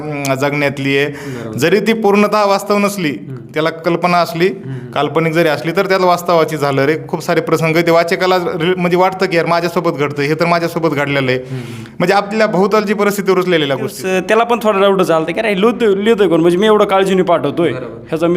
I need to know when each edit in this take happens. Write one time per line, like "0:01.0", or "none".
0:14.0